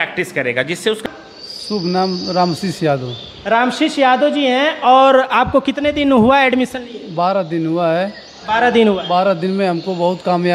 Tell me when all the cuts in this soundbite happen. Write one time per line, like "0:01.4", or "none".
0:01.0